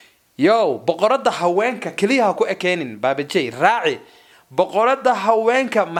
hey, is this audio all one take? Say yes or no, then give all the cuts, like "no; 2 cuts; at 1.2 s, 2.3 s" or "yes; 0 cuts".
yes; 0 cuts